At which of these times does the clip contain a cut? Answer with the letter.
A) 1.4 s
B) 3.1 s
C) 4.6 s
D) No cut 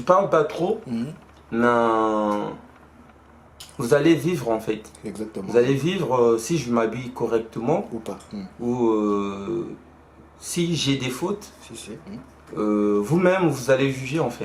D